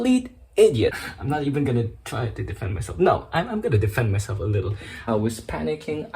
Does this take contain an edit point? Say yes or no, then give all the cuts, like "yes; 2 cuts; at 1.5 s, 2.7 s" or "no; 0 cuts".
yes; 2 cuts; at 1.1 s, 5.0 s